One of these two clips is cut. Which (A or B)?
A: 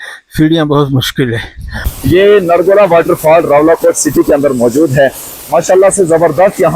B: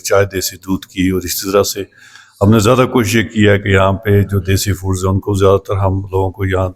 A